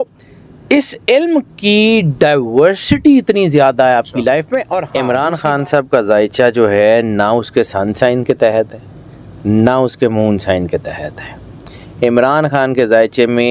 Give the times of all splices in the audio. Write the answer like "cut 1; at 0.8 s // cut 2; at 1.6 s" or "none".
cut 1; at 4.9 s